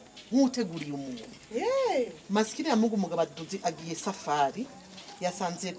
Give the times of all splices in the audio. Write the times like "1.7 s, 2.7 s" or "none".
2.2 s